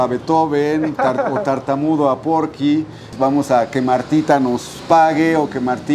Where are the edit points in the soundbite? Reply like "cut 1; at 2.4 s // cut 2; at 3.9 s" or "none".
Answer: cut 1; at 3.0 s